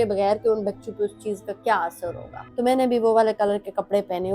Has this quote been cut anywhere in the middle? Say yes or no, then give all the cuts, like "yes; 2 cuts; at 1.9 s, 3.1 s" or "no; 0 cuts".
yes; 1 cut; at 2.3 s